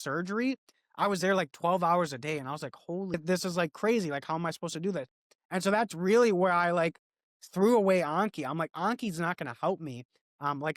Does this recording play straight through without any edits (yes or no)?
no